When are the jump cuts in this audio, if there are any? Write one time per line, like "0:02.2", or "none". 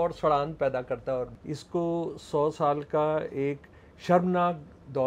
0:01.4

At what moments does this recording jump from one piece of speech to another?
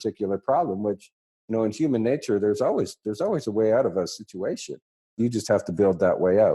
0:05.1

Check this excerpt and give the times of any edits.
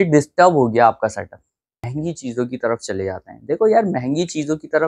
0:01.9

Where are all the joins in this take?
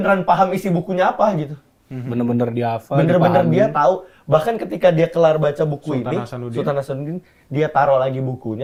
none

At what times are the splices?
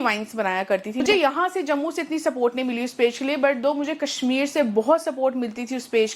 0:01.0

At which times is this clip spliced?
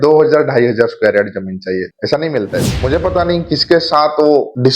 0:02.7

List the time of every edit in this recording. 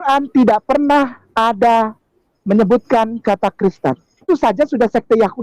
0:04.3

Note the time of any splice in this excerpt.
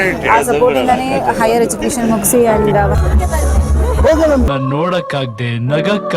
0:03.0

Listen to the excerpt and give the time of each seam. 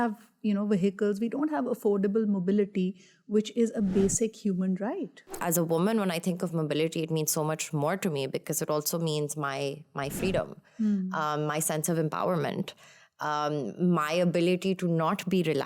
0:05.4

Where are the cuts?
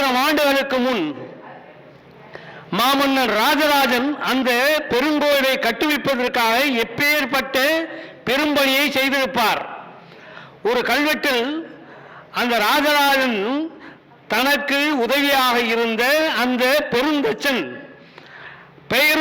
none

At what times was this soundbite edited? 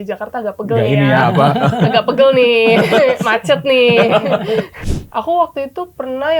0:04.8

